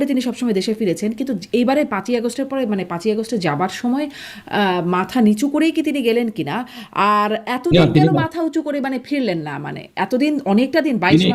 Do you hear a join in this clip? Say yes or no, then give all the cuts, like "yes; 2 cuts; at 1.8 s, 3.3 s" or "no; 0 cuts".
no; 0 cuts